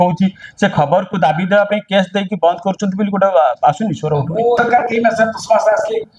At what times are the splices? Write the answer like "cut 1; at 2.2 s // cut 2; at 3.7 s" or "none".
cut 1; at 4.6 s